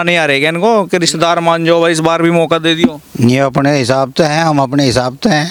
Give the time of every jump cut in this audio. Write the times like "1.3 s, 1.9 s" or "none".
none

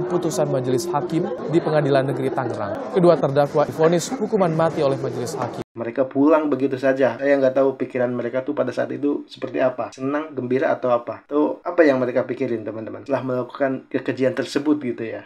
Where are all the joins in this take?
3.7 s, 5.8 s

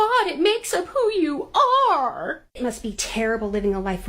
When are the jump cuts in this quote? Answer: 2.5 s

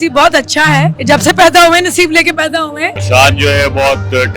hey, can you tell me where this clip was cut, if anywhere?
1.0 s, 2.9 s

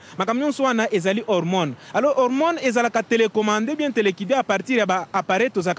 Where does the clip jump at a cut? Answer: none

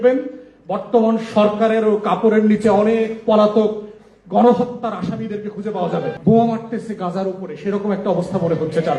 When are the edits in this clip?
6.1 s

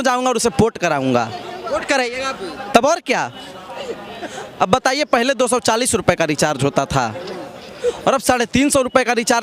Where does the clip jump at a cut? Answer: none

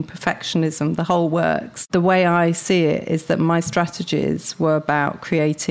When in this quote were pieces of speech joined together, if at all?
1.9 s

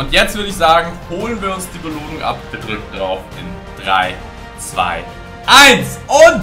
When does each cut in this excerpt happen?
2.5 s

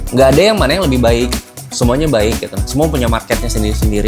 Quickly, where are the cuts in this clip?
none

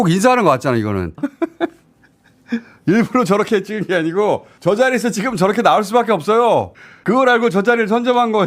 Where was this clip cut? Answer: 1.2 s

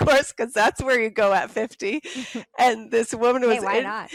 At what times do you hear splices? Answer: none

